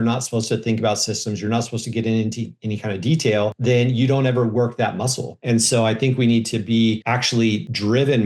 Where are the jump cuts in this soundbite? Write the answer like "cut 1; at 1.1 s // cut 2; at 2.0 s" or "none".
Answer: cut 1; at 3.6 s // cut 2; at 5.3 s // cut 3; at 7.3 s